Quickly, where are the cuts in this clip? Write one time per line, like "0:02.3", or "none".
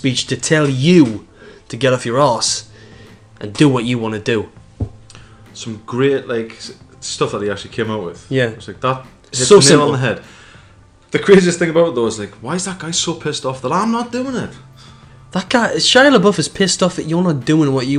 none